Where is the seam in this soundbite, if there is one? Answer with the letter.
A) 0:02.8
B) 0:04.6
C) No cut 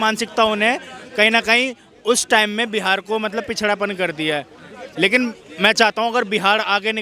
C